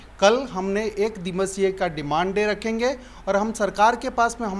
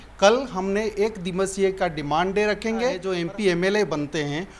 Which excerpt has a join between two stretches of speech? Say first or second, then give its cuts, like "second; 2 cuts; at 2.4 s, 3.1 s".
second; 1 cut; at 3.0 s